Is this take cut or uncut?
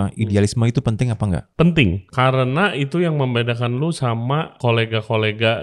cut